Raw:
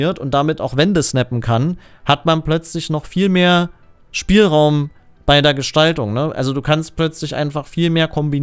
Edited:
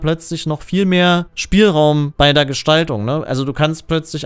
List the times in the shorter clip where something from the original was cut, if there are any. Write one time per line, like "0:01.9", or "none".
0:01.3
0:02.1